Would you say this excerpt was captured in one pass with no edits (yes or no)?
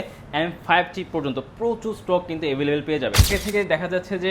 no